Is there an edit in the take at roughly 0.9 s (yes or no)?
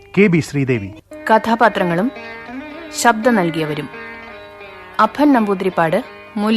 yes